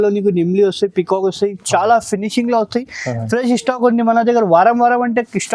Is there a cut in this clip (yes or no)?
no